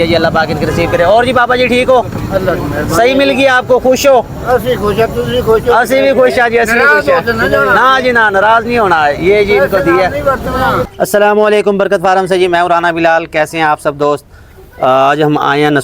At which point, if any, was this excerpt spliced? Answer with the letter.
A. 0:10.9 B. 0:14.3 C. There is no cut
A